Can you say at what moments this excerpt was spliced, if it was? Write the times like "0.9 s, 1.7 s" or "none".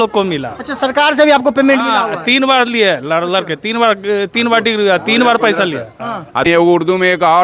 6.4 s